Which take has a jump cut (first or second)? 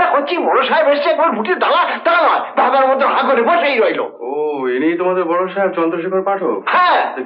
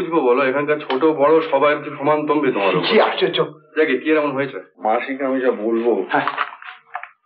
second